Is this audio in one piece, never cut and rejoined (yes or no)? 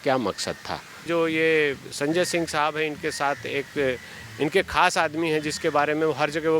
no